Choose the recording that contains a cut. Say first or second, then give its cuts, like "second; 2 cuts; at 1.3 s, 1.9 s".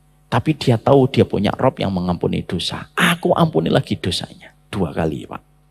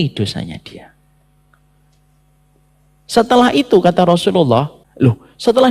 second; 1 cut; at 4.8 s